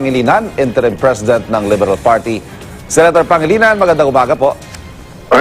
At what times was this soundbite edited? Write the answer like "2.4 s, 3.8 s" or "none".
none